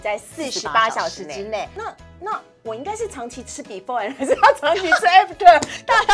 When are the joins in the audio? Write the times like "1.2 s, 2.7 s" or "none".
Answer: 1.7 s